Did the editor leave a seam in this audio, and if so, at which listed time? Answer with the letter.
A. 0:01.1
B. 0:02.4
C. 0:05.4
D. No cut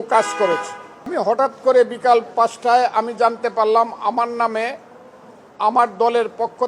A